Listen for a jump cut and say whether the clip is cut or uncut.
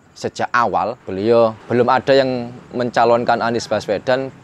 cut